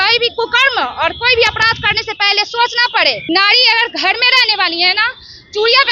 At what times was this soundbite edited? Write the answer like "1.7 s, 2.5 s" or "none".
3.2 s